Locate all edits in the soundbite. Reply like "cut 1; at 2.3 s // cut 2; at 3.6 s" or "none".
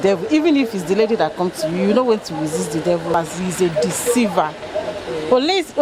cut 1; at 3.1 s

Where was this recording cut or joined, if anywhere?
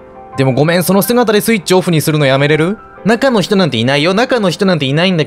cut 1; at 2.9 s

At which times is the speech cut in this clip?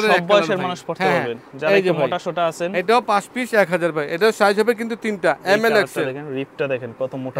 none

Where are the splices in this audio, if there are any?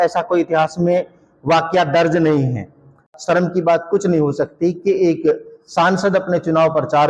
cut 1; at 3.0 s

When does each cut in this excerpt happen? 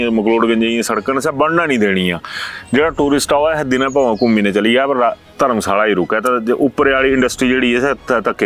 none

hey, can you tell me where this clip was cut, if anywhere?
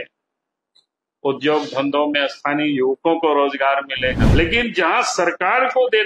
cut 1; at 4.2 s

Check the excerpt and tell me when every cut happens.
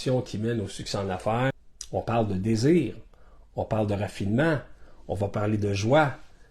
cut 1; at 1.5 s

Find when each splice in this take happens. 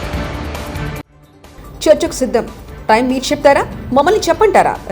cut 1; at 1.0 s

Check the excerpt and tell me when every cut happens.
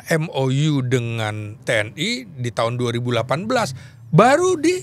cut 1; at 1.6 s

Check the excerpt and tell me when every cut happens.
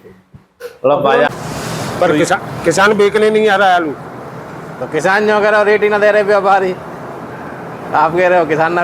cut 1; at 1.3 s

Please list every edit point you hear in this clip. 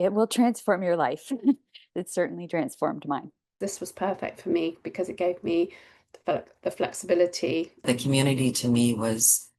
cut 1; at 3.6 s // cut 2; at 7.8 s

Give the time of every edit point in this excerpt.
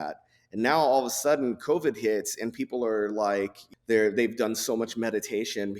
cut 1; at 3.6 s

